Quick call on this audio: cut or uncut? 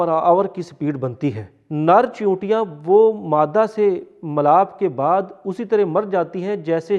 cut